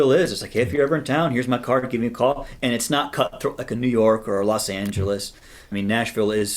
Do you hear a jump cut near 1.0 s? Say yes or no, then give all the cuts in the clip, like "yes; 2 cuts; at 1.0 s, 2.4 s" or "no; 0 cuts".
no; 2 cuts; at 2.5 s, 5.7 s